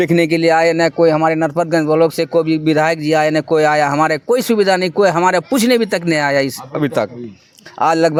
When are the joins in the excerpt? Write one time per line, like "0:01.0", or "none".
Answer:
none